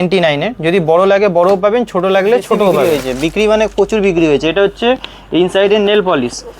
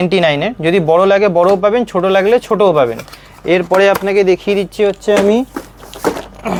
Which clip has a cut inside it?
first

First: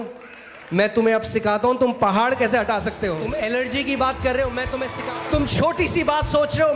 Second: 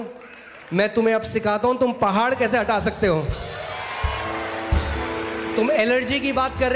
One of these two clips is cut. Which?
first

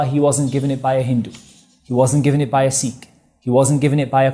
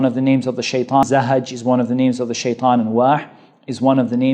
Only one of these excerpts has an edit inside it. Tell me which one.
second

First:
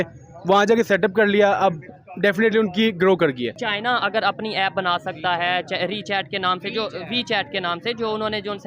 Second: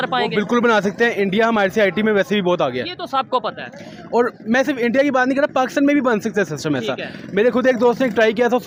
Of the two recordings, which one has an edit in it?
first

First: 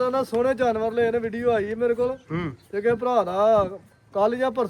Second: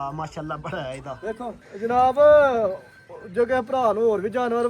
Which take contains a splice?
second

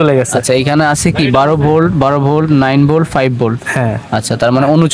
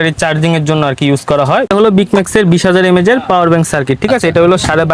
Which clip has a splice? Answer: second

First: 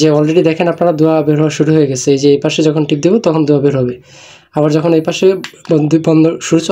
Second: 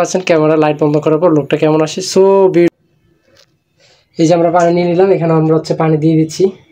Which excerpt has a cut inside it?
second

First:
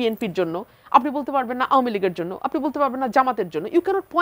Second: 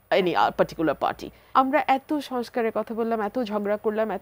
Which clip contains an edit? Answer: second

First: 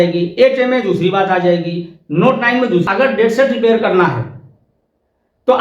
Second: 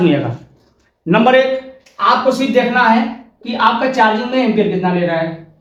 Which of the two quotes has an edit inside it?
first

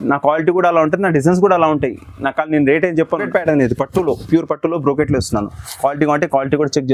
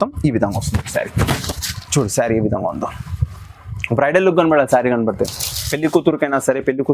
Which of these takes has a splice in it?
first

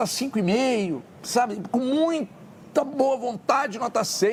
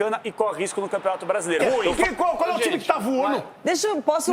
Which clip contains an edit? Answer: second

